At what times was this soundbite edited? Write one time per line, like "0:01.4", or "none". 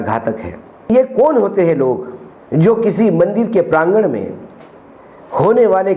0:00.9

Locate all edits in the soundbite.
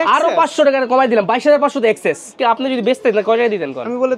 0:02.3

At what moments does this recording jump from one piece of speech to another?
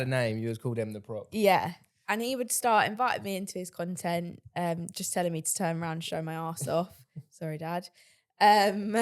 none

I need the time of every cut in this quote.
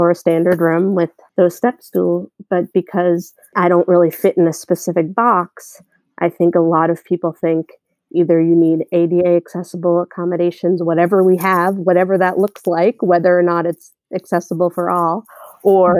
0:01.2
0:03.5

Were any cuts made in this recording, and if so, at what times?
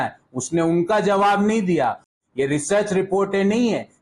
0:02.1

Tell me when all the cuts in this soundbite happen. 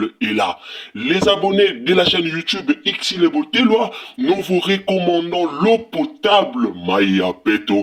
none

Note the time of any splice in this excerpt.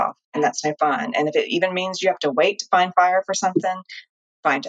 none

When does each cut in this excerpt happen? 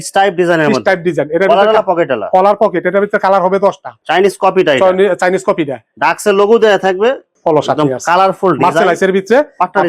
0:03.9
0:07.3

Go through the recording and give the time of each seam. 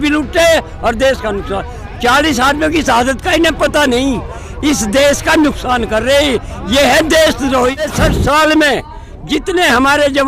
0:07.9

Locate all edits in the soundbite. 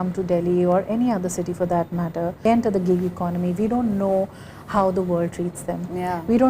0:02.4

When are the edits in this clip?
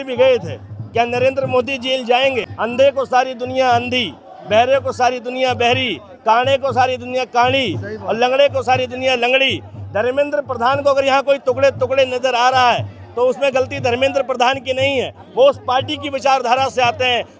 0:02.5

